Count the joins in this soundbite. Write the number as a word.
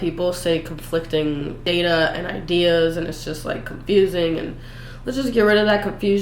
one